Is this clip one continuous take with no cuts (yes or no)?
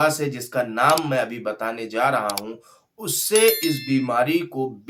yes